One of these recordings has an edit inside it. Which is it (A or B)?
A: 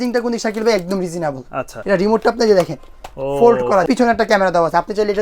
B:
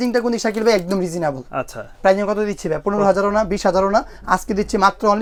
A